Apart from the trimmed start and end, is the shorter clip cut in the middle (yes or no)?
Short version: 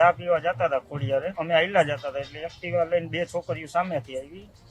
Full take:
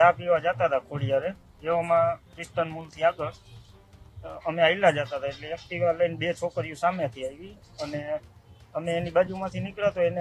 yes